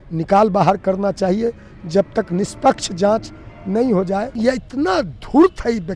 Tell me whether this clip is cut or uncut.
cut